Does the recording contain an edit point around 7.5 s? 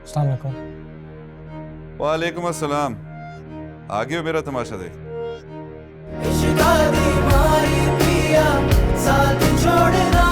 no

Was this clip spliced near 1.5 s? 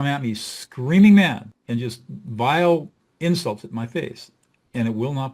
yes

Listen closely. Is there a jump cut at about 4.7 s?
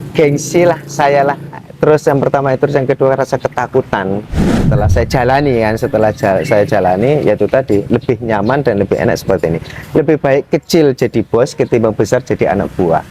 yes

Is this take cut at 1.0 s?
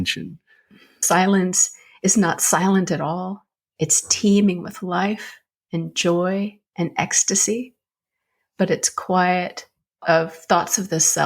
yes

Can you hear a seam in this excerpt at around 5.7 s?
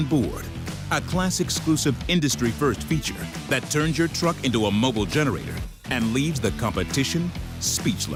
no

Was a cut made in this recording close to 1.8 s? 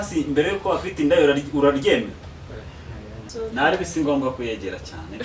no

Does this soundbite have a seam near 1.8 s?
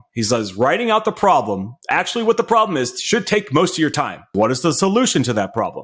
no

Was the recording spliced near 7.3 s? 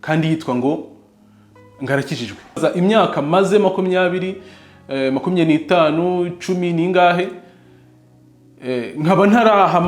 no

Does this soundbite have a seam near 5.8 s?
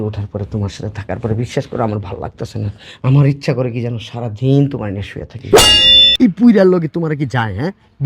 yes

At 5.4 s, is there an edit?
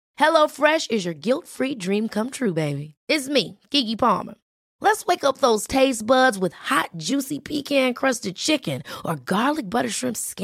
no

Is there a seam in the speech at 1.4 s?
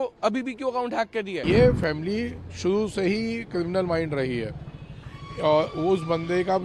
yes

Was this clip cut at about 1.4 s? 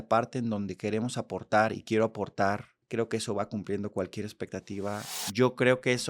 no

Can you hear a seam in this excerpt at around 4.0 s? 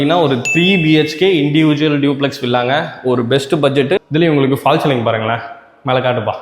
yes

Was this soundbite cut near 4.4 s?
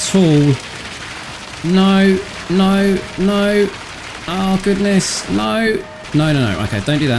no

